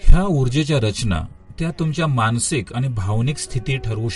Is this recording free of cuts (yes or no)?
no